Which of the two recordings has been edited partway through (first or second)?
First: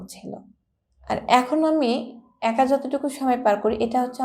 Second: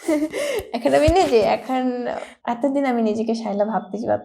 second